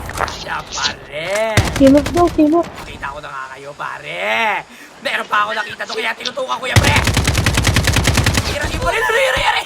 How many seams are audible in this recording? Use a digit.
1